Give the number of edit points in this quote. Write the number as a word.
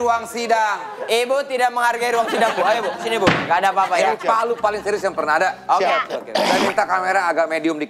one